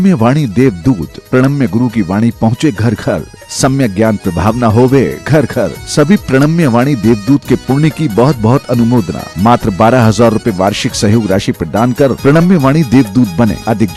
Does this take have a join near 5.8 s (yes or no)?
no